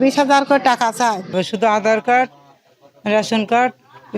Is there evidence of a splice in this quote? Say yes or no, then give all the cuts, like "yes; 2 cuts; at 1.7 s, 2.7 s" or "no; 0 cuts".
yes; 1 cut; at 1.4 s